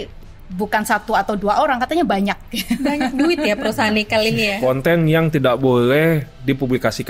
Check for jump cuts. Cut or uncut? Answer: cut